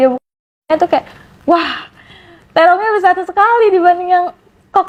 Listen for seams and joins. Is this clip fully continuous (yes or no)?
yes